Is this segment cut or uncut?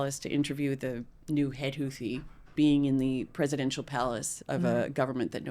cut